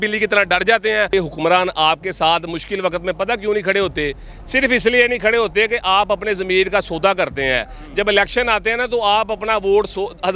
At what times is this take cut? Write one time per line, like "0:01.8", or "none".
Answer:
0:01.1